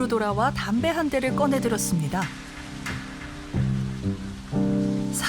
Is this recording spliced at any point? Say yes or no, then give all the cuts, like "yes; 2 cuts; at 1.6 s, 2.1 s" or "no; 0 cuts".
yes; 1 cut; at 2.8 s